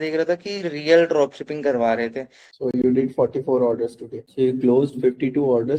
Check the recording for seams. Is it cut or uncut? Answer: cut